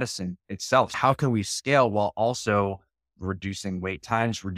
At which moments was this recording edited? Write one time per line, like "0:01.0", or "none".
0:00.9

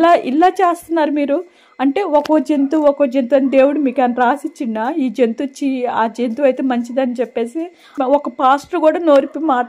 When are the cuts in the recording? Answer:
0:07.9

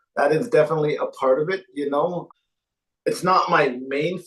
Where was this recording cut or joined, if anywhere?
0:02.2

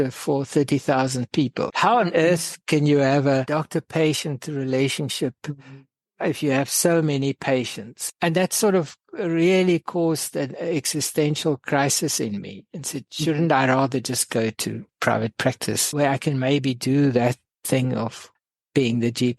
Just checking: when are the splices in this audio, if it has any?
0:14.9

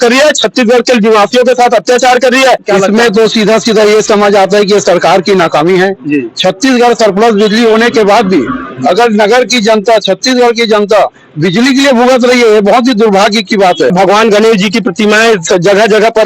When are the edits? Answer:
0:02.6
0:13.9

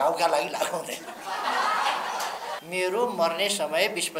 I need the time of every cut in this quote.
0:02.6

